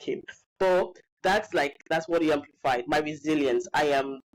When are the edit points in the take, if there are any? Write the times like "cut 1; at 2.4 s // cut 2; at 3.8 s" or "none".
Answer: none